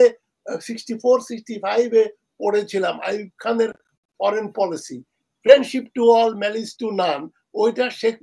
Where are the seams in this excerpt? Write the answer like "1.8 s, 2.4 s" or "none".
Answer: none

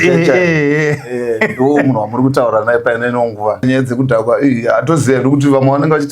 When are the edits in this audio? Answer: 3.6 s

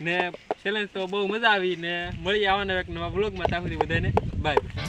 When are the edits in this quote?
none

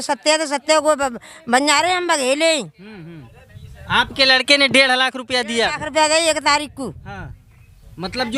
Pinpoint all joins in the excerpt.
none

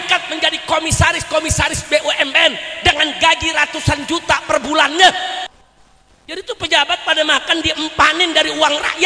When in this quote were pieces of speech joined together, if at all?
5.5 s

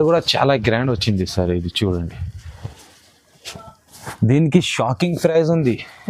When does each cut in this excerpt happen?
none

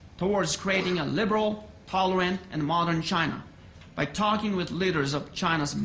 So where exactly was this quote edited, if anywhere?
2.2 s

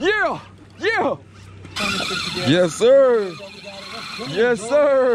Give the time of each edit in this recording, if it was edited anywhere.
1.7 s

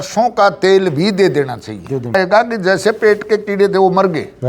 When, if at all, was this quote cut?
2.1 s

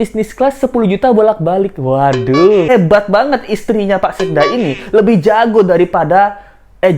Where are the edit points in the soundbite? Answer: 2.7 s

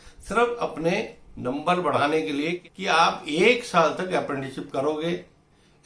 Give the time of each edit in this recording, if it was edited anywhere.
2.6 s

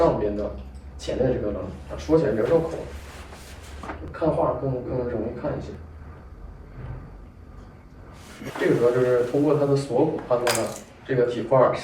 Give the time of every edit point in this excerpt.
8.5 s

